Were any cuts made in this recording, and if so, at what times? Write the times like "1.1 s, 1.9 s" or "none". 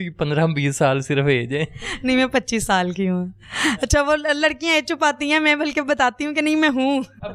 none